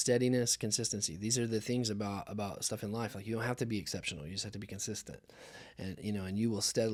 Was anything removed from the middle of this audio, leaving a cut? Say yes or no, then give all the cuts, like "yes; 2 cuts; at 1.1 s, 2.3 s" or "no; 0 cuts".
no; 0 cuts